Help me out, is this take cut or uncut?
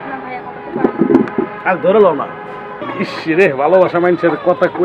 cut